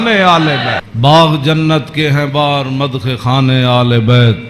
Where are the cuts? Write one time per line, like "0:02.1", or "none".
0:00.9